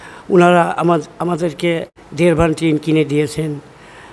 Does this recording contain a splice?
yes; 1 cut; at 1.9 s

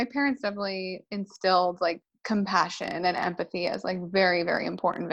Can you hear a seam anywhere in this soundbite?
yes; 1 cut; at 2.1 s

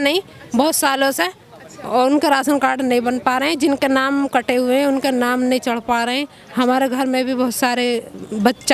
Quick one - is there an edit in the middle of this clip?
no; 0 cuts

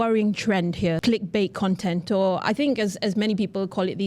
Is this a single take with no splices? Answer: no; 1 cut; at 1.0 s

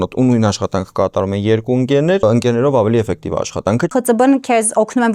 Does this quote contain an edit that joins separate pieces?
yes; 2 cuts; at 2.2 s, 3.9 s

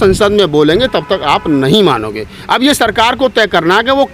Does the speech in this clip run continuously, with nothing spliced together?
yes; 0 cuts

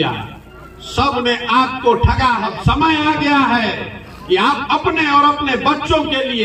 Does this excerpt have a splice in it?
yes; 1 cut; at 2.5 s

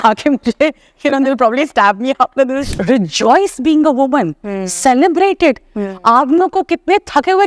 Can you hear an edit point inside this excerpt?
yes; 1 cut; at 2.7 s

